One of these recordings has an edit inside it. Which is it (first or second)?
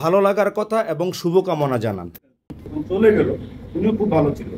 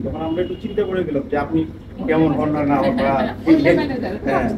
first